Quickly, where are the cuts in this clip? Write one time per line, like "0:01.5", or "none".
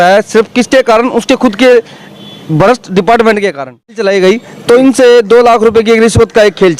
0:04.0